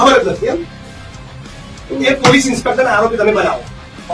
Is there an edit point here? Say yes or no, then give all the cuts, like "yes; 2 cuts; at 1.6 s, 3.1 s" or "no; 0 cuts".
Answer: no; 0 cuts